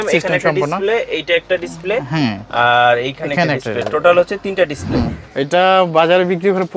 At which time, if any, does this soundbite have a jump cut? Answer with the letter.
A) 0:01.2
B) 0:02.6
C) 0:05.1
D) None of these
C